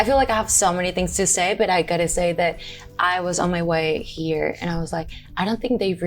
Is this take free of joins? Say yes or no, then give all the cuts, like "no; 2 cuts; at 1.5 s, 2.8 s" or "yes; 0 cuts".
yes; 0 cuts